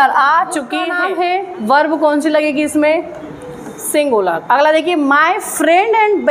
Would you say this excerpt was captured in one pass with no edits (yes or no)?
no